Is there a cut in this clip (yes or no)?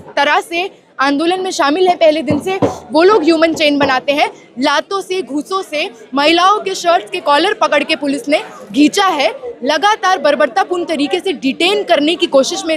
no